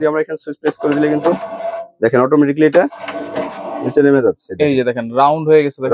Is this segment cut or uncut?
uncut